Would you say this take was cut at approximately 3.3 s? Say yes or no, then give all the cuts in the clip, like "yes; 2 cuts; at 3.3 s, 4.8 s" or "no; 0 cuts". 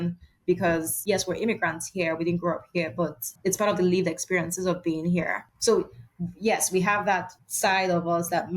yes; 4 cuts; at 0.9 s, 3.3 s, 5.5 s, 7.4 s